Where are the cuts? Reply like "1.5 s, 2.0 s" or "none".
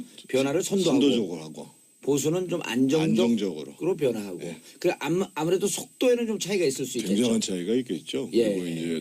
3.4 s